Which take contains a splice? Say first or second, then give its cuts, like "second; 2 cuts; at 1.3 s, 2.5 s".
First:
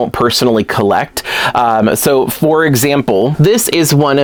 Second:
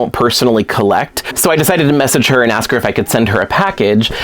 second; 1 cut; at 1.2 s